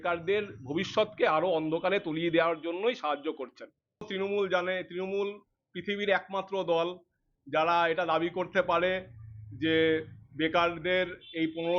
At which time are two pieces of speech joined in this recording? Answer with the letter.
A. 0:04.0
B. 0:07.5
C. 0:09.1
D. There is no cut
A